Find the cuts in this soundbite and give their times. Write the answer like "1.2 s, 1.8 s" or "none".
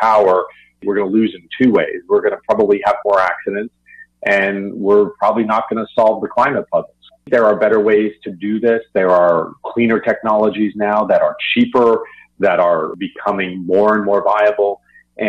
7.3 s